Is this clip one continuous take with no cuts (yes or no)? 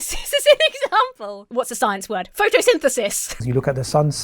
no